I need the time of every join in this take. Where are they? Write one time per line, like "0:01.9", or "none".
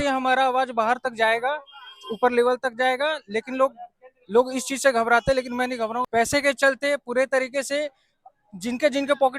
0:06.1